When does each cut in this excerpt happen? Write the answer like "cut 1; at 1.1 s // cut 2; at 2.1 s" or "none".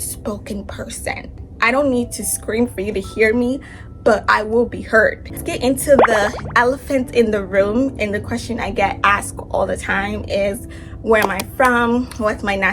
cut 1; at 1.2 s // cut 2; at 5.3 s